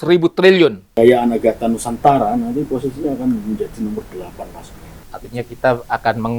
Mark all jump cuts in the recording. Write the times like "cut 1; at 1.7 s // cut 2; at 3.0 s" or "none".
cut 1; at 0.8 s // cut 2; at 5.0 s

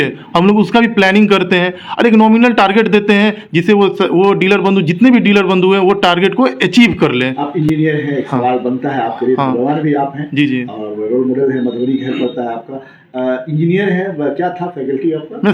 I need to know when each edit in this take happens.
none

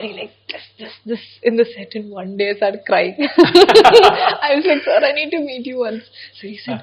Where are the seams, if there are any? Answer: none

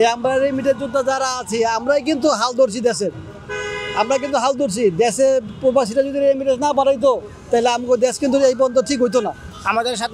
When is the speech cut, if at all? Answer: none

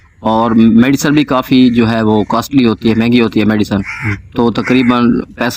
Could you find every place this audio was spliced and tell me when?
none

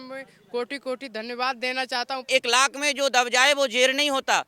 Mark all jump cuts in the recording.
cut 1; at 2.3 s

